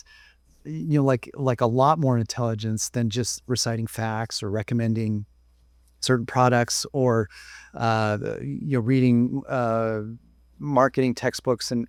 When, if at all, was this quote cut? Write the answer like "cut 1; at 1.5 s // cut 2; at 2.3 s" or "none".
none